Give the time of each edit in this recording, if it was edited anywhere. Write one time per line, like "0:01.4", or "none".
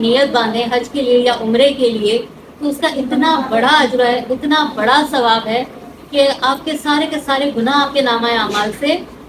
none